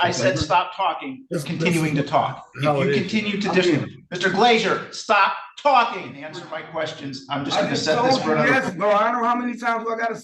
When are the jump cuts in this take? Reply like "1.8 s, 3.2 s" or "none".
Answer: 6.4 s